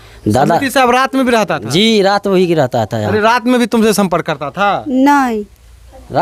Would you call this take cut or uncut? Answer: uncut